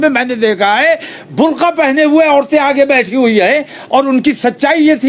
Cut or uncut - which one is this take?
uncut